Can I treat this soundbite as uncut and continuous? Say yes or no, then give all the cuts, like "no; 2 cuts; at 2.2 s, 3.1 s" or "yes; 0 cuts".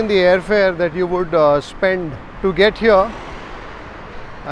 yes; 0 cuts